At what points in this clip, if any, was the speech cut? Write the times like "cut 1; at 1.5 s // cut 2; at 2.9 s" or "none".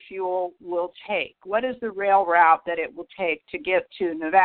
none